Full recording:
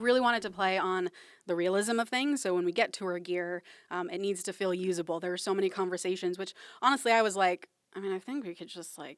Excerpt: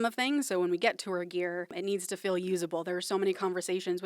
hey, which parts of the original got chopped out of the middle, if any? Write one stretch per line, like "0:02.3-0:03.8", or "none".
0:03.7-0:04.1